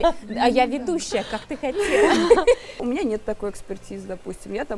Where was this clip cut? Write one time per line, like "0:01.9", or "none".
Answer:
0:02.8